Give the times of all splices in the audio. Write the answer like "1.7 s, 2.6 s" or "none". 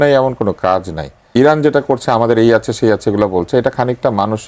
1.2 s